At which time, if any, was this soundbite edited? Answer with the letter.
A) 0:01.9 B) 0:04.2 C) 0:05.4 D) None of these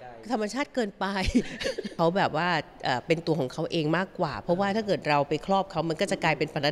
A